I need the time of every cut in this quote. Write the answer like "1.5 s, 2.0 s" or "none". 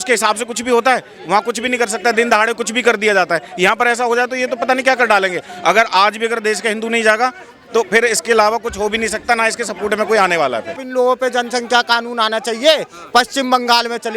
10.8 s